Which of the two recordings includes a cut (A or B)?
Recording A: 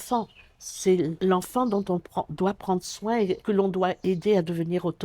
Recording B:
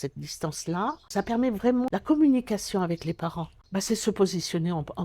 A